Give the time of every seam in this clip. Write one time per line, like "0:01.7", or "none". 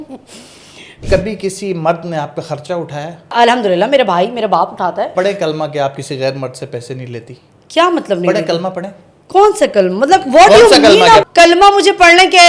0:01.0
0:03.3
0:05.1
0:11.2